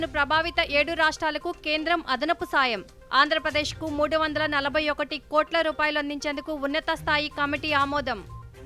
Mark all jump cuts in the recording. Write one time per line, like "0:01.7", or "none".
none

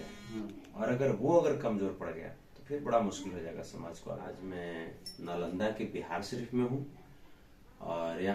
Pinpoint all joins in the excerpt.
0:04.4

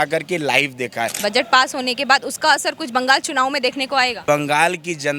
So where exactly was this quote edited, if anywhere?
0:01.1
0:04.2

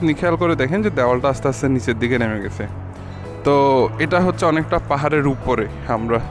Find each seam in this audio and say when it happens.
none

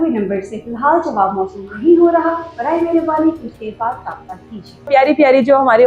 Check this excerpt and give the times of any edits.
0:04.9

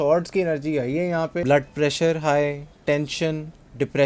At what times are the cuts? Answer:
0:01.4

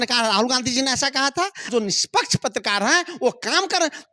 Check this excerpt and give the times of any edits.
0:01.7

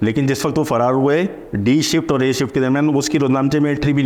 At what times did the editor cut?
none

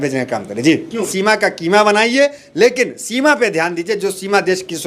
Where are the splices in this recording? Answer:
0:01.1

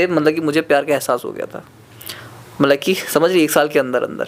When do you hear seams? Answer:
none

